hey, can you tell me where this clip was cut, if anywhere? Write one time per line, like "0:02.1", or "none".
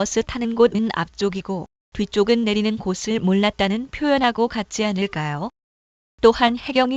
none